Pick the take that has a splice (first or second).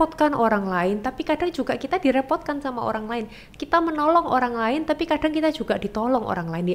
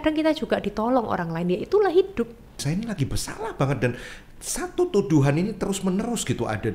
second